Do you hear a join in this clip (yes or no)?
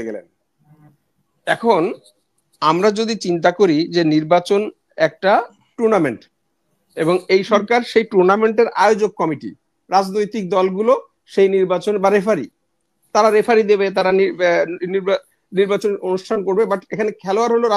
no